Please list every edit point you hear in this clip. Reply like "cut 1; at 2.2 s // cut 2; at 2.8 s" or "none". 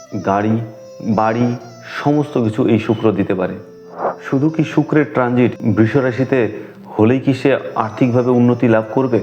cut 1; at 4.0 s